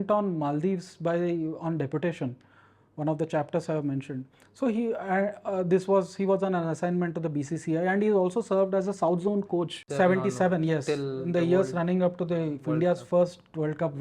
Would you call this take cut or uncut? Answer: cut